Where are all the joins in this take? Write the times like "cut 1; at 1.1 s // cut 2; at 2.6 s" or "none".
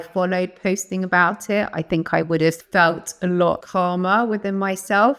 cut 1; at 2.6 s // cut 2; at 3.6 s